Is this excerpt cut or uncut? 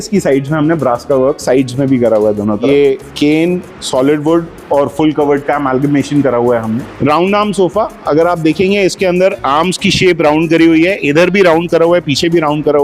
cut